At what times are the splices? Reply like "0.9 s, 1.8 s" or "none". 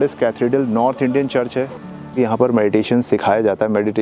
2.1 s